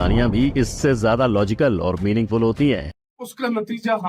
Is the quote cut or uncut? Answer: cut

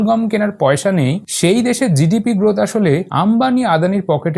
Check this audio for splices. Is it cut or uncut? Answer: cut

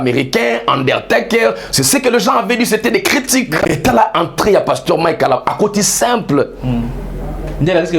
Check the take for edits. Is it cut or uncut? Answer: cut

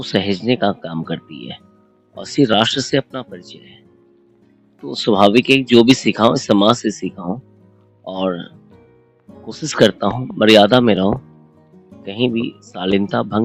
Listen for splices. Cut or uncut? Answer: uncut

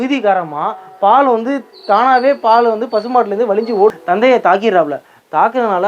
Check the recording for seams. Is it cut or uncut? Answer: cut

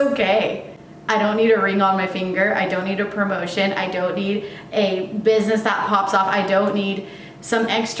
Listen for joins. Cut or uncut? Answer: uncut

